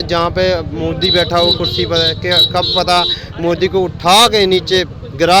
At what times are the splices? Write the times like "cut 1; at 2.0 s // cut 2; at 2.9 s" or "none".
none